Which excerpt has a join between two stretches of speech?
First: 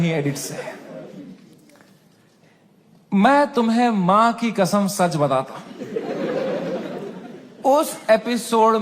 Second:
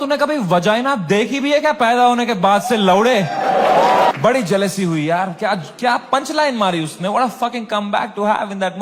second; 1 cut; at 4.1 s

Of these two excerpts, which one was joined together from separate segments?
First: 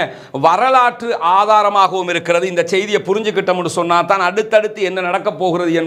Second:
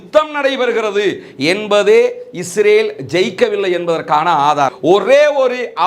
second; 1 cut; at 4.7 s

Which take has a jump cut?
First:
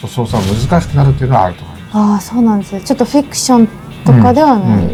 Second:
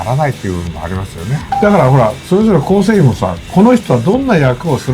second; 1 cut; at 1.4 s

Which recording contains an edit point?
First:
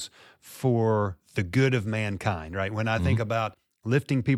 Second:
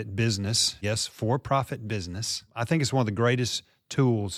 second; 2 cuts; at 0.8 s, 2.5 s

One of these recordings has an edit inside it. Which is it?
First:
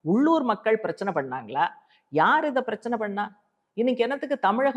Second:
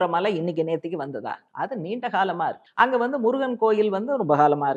second; 2 cuts; at 1.4 s, 2.6 s

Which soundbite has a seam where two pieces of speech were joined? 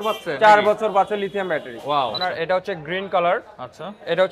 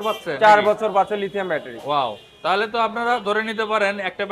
first; 1 cut; at 2.2 s

